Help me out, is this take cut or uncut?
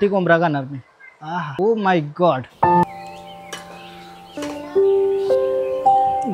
cut